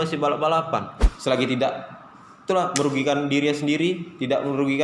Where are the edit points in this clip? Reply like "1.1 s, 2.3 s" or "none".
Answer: 1.1 s